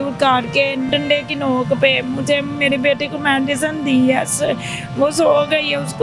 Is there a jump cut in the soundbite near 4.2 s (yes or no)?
no